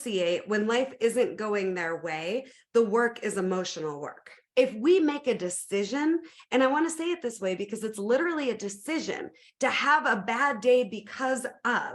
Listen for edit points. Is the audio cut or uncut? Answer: cut